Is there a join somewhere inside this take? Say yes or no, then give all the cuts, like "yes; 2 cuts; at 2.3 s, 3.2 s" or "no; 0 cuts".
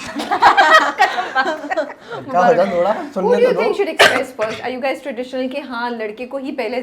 no; 0 cuts